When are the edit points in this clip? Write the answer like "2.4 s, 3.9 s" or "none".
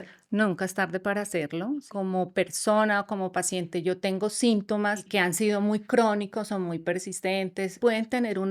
1.9 s, 5.1 s, 7.8 s